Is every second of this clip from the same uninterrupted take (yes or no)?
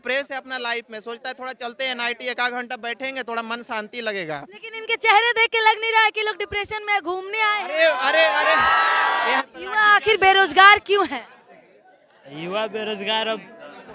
no